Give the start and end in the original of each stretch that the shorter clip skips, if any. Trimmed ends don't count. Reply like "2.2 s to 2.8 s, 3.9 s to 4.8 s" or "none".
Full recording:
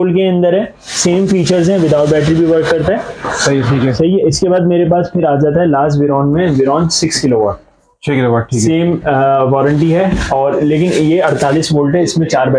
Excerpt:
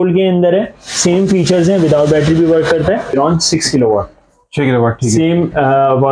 3.1 s to 6.6 s